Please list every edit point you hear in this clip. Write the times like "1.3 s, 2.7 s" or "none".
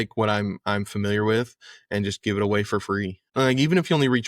3.2 s

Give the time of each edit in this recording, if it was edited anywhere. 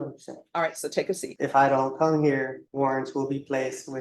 1.3 s, 2.6 s

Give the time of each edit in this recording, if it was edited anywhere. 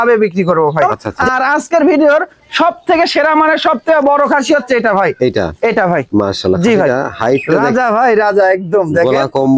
1.0 s, 7.6 s

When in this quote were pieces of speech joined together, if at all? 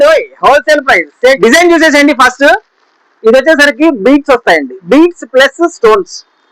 1.4 s

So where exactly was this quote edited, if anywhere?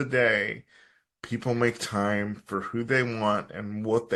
none

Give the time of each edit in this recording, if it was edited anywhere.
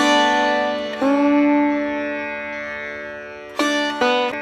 0.9 s

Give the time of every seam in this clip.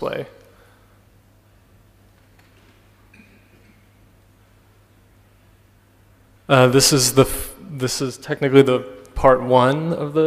4.2 s

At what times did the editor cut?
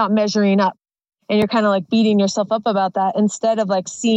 0.9 s

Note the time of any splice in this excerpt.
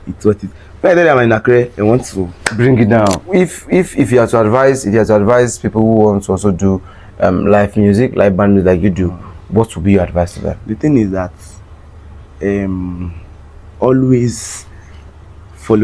3.2 s

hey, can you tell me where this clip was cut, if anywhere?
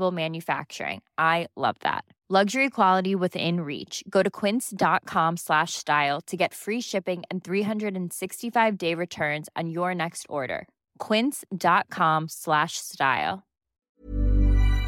13.7 s

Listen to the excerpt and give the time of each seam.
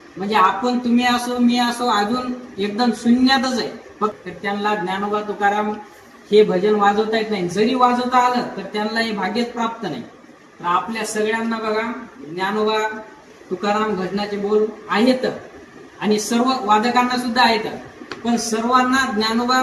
4.2 s

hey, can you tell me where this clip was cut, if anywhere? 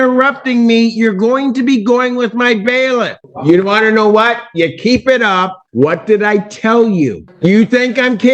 3.2 s, 5.6 s, 7.2 s

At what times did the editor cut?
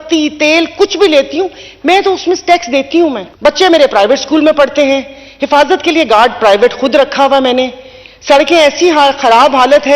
3.3 s

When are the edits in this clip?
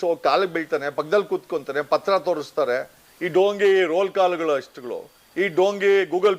2.5 s

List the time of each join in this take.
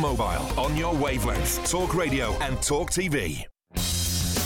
3.5 s

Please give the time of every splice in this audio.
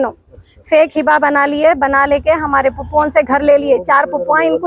none

